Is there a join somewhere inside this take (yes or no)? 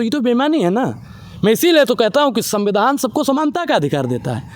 no